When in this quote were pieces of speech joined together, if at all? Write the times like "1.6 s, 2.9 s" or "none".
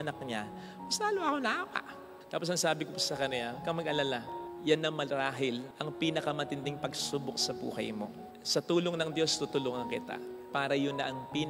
2.2 s, 8.3 s

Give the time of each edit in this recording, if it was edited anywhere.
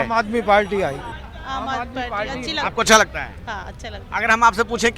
1.1 s

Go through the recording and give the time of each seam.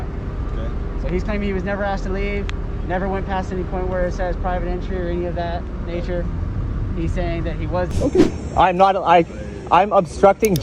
7.9 s

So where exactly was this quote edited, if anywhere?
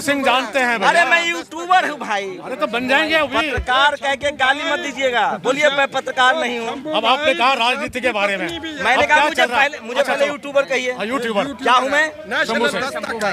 none

